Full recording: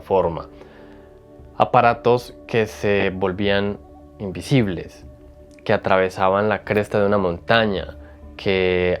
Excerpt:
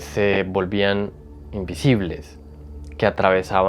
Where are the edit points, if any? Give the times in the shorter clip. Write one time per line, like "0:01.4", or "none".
none